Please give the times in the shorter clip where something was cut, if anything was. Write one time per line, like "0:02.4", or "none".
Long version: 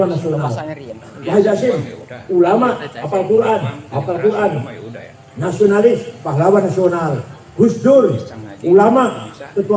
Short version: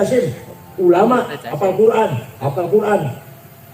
none

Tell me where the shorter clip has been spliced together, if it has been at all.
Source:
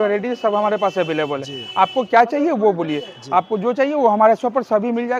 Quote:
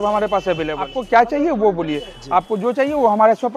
0:01.0

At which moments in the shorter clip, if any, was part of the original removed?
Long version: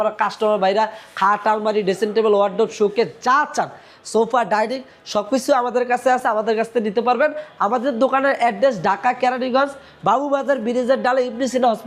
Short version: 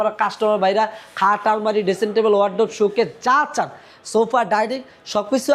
none

